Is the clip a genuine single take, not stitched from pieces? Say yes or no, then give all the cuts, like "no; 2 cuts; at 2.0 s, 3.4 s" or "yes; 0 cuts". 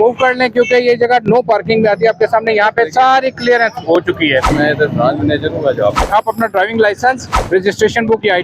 no; 3 cuts; at 4.5 s, 6.1 s, 7.3 s